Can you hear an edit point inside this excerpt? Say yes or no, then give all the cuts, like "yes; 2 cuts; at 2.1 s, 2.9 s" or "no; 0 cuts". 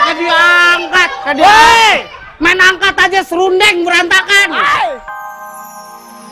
yes; 1 cut; at 5.0 s